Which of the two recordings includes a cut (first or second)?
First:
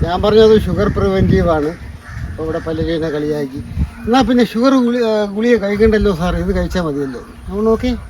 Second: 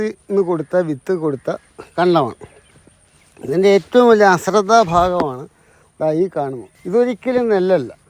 second